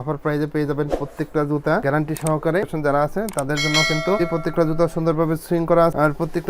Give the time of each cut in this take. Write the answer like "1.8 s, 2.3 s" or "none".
2.7 s